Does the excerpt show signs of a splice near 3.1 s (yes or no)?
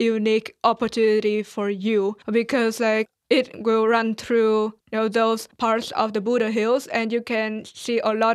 yes